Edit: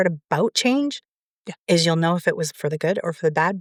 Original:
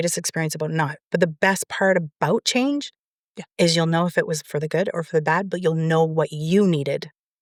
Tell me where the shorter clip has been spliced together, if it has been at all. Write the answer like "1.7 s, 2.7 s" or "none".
none